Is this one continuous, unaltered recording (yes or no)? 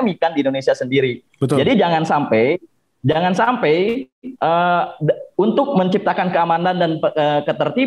yes